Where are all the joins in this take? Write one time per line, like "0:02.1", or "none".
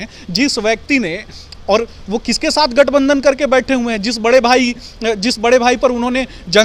none